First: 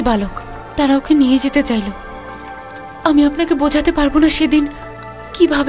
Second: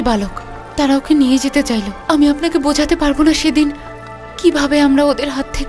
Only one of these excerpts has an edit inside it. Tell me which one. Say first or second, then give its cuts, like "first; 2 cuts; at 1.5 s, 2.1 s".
second; 1 cut; at 1.9 s